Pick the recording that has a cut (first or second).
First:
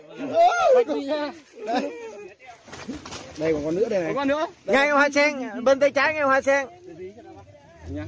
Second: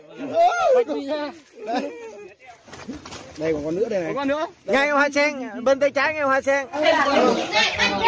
second